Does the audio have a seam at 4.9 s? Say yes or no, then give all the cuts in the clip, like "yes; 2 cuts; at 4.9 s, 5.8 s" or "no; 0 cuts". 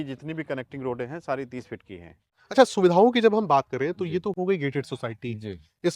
no; 1 cut; at 2.4 s